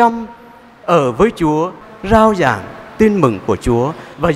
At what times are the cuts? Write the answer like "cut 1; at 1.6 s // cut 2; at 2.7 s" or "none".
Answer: cut 1; at 1.8 s